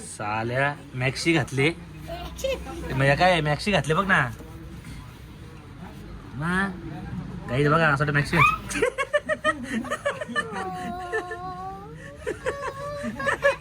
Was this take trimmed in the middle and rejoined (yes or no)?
no